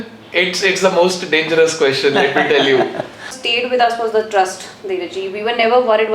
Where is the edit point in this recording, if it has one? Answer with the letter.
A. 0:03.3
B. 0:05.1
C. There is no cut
A